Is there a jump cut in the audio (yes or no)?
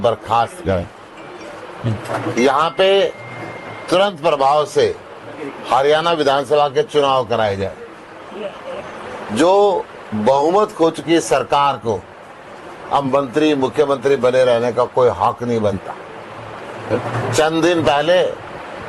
no